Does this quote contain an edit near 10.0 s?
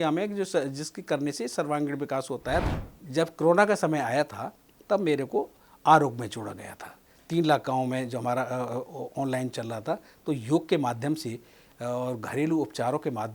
no; 1 cut; at 2.7 s

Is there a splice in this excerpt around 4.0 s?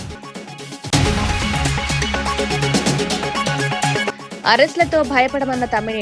yes; 2 cuts; at 0.9 s, 4.0 s

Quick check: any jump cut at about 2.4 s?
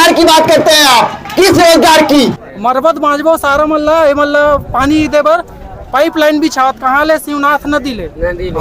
yes; 1 cut; at 2.4 s

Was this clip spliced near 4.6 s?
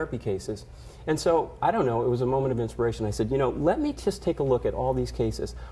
yes; 1 cut; at 4.6 s

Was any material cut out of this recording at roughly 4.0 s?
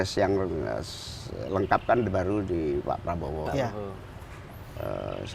no; 0 cuts

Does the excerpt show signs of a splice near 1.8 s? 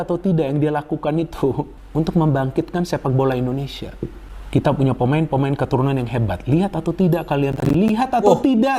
yes; 1 cut; at 1.8 s

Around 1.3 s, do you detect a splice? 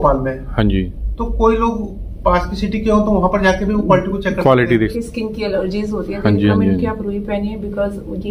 no; 1 cut; at 4.9 s

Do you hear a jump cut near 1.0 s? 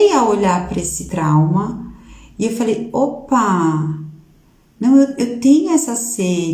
yes; 1 cut; at 1.0 s

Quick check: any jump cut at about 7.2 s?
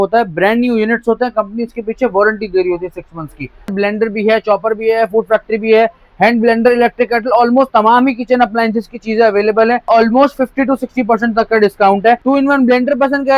no; 3 cuts; at 3.7 s, 9.9 s, 12.2 s

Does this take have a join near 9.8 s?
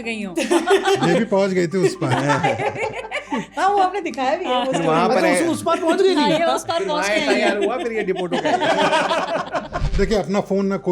yes; 1 cut; at 9.8 s

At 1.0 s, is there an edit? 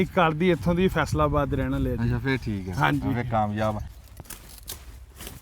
no; 1 cut; at 3.9 s

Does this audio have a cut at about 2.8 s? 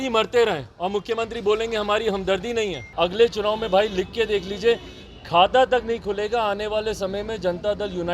yes; 1 cut; at 2.8 s

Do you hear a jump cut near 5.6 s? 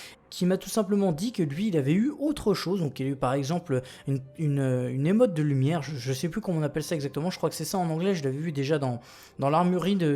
yes; 1 cut; at 5.6 s

